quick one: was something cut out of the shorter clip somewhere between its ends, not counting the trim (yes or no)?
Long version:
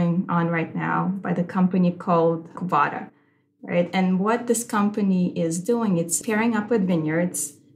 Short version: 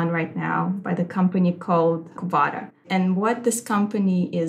yes